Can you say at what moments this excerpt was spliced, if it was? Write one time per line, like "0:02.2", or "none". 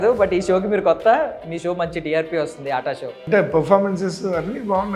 0:03.1